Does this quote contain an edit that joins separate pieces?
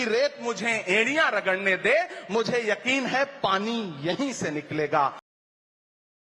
no; 0 cuts

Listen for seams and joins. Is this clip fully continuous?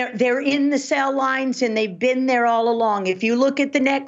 yes; 0 cuts

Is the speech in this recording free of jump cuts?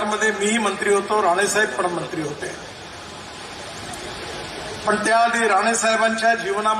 yes; 0 cuts

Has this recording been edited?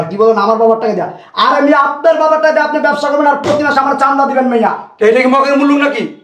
no; 0 cuts

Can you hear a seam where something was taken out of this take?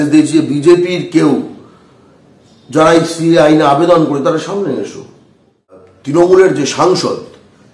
yes; 1 cut; at 5.9 s

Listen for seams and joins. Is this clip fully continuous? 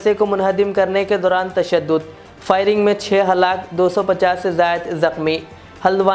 yes; 0 cuts

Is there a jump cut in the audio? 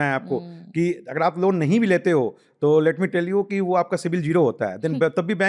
no; 0 cuts

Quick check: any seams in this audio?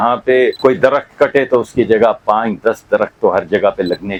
no; 0 cuts

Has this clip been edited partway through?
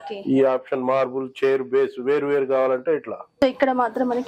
yes; 1 cut; at 3.2 s

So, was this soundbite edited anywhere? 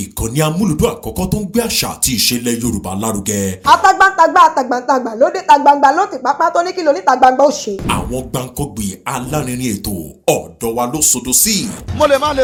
no; 0 cuts

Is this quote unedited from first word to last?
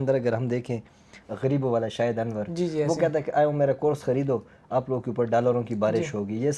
yes; 0 cuts

